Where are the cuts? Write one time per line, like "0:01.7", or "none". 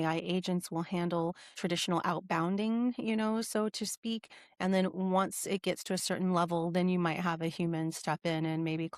none